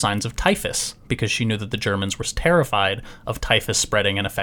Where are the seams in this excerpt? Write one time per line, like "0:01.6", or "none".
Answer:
none